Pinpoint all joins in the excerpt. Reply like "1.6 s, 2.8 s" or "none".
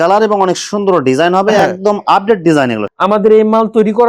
2.8 s